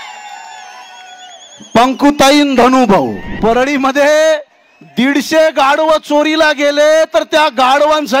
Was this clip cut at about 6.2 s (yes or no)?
no